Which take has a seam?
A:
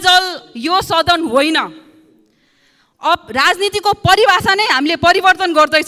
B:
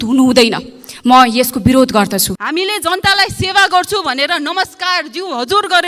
B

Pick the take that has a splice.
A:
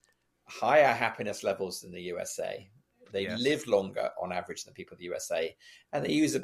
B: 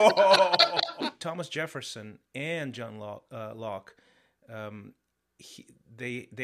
B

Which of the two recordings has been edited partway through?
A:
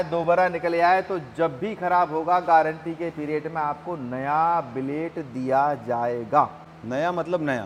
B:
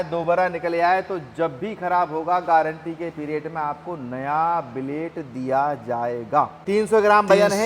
B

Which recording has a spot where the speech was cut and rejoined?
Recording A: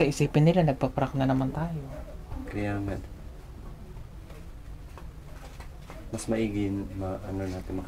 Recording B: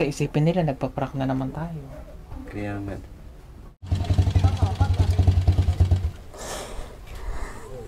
B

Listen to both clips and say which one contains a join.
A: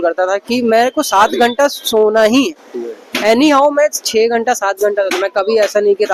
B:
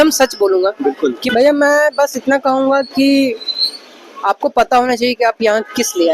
B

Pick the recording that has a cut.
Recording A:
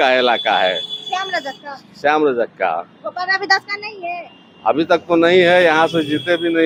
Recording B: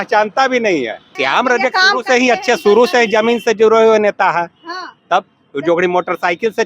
B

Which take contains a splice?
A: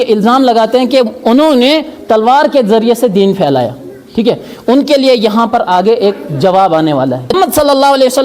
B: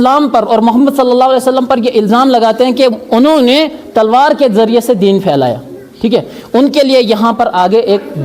A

